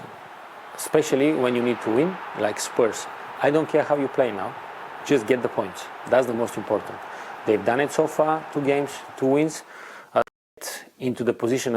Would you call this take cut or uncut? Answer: cut